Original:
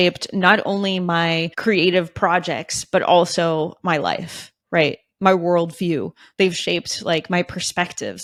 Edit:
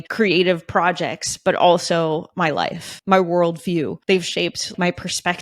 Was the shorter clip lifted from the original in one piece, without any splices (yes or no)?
no